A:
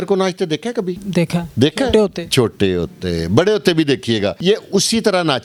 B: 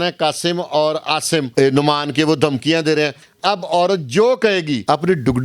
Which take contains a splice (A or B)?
B